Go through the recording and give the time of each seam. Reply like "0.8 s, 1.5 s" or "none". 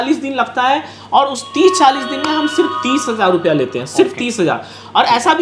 none